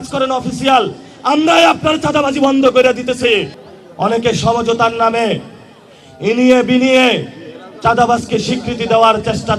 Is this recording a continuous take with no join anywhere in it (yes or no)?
no